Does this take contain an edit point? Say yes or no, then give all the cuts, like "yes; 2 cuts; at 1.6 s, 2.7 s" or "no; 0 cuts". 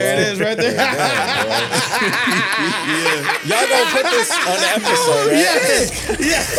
no; 0 cuts